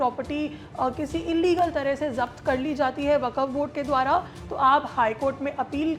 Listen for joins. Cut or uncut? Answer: uncut